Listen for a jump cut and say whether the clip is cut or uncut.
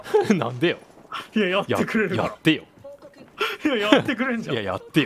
uncut